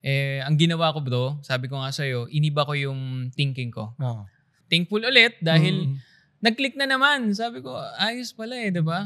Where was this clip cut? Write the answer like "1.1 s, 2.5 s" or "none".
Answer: 4.6 s